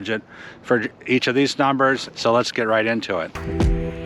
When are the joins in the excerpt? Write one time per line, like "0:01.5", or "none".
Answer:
0:02.1
0:03.3